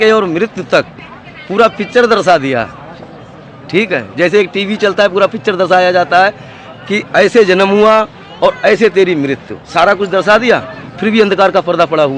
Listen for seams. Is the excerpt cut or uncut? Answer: uncut